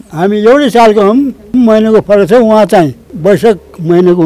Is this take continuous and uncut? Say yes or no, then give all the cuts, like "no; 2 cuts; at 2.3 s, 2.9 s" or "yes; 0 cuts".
yes; 0 cuts